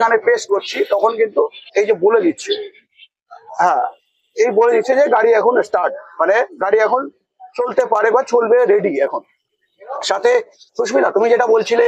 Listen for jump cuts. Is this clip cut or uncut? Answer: uncut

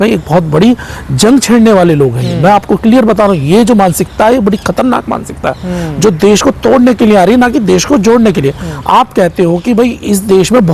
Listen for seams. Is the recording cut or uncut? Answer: uncut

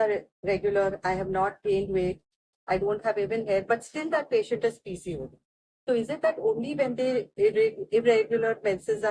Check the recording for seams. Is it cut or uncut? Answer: uncut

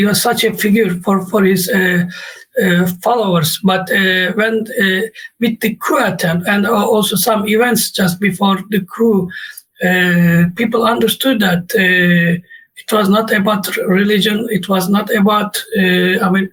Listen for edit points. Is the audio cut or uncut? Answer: uncut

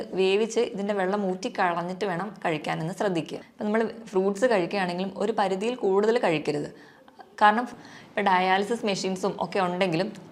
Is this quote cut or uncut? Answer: cut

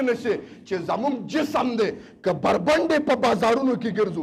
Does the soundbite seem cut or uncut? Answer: uncut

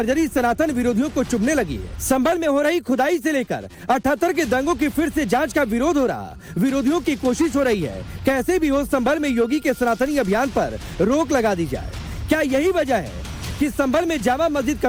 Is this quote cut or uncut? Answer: uncut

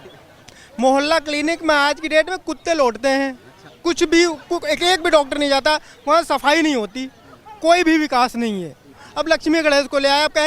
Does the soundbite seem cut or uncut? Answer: cut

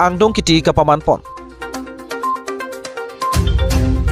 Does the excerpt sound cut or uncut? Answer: cut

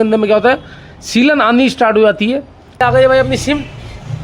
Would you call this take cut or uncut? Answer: cut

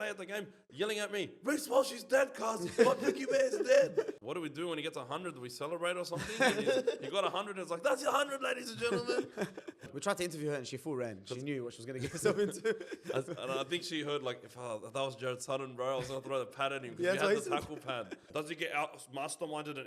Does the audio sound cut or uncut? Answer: cut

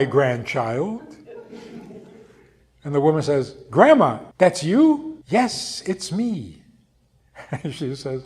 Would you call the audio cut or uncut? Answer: cut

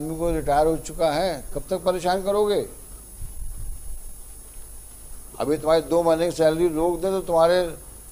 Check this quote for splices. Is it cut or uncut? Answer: uncut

